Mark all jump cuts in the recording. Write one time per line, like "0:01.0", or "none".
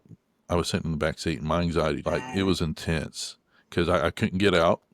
0:02.0